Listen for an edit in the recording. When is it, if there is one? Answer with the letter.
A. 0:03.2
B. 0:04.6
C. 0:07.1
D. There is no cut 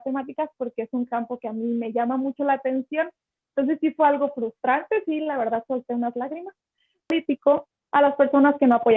C